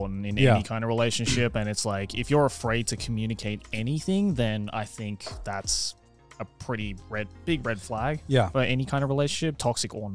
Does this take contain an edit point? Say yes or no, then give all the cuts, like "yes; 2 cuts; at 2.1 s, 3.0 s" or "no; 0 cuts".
no; 0 cuts